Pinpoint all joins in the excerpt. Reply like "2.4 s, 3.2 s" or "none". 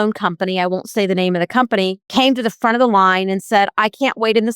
2.0 s

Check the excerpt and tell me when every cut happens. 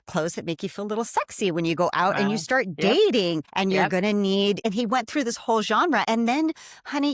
3.5 s, 4.6 s, 6.0 s

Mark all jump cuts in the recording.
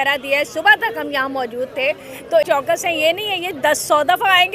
2.4 s

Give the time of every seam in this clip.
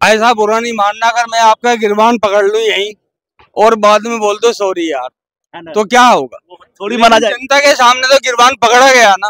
none

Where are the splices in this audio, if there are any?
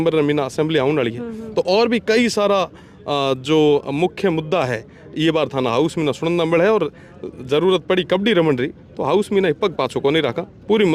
none

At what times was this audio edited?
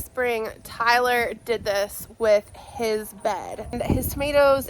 3.7 s

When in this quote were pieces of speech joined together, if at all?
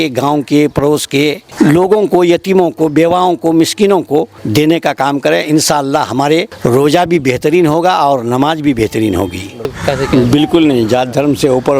1.4 s, 4.4 s, 6.5 s, 9.8 s

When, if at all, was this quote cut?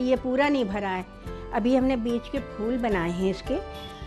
none

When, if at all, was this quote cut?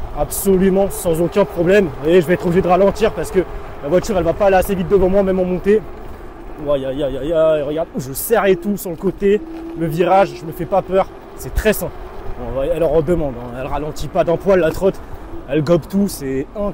none

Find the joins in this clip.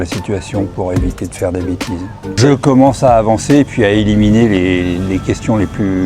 2.4 s

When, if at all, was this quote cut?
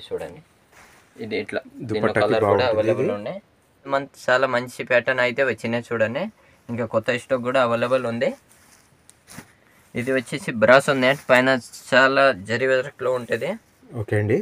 3.9 s

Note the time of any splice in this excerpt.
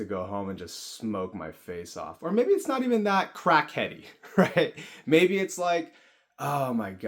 none

